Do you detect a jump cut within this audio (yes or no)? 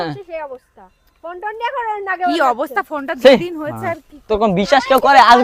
no